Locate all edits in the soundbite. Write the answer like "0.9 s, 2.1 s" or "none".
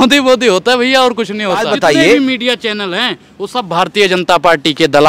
1.7 s